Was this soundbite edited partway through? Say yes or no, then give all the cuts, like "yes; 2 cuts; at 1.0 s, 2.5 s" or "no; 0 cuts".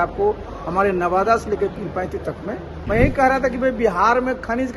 yes; 1 cut; at 2.7 s